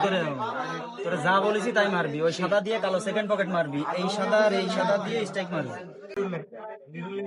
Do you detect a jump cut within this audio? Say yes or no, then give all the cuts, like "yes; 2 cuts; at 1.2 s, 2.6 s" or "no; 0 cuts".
yes; 1 cut; at 6.2 s